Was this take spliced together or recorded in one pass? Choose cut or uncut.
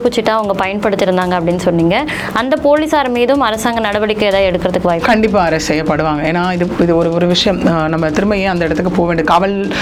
uncut